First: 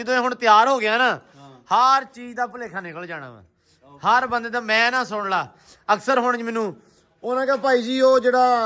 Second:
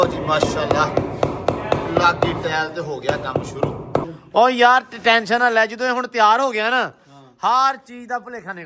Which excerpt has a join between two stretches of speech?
second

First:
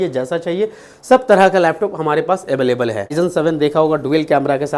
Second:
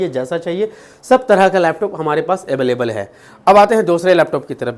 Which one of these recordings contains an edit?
first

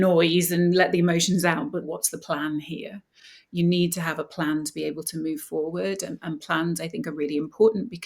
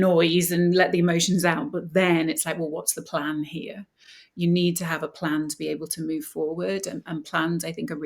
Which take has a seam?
first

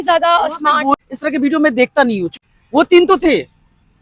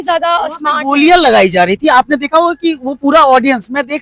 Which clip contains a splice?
first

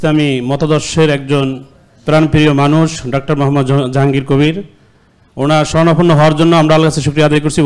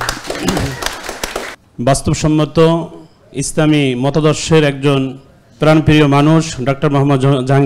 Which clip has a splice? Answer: second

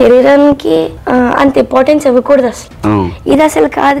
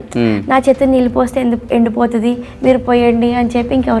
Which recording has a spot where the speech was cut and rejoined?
first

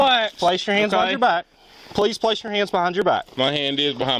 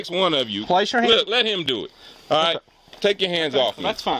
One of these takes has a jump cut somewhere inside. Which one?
first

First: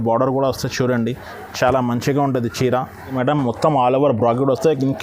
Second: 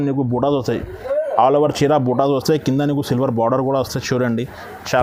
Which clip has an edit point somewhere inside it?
first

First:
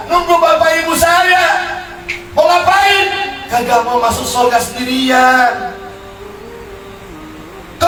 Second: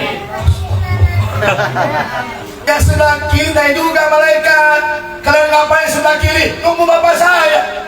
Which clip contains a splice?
second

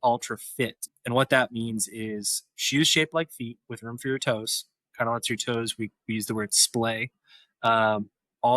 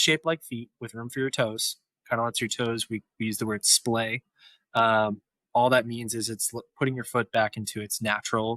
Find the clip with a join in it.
first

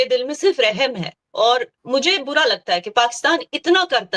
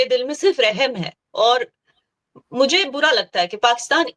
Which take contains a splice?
first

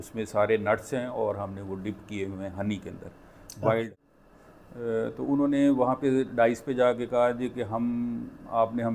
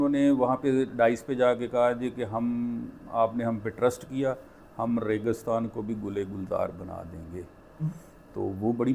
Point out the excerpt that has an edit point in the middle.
first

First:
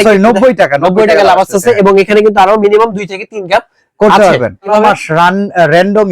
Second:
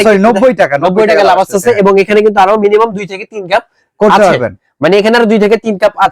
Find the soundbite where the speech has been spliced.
first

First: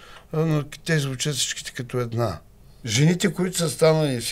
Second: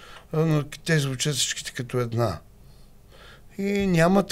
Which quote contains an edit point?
first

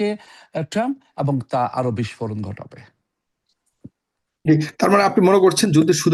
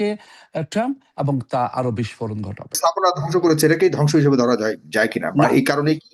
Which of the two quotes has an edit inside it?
second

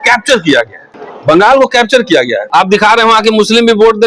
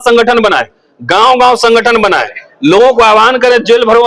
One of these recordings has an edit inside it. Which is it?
first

